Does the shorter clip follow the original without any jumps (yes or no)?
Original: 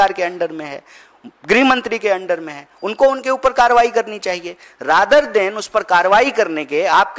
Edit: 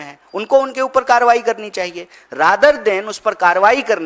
yes